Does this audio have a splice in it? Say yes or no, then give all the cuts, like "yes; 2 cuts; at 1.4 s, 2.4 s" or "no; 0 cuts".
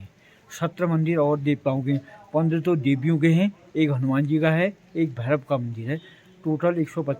no; 0 cuts